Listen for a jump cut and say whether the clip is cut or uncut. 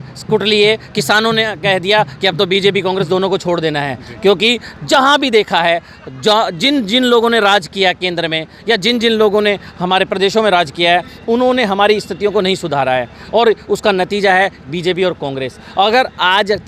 uncut